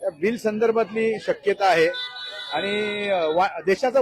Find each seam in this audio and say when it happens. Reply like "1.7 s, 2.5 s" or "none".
none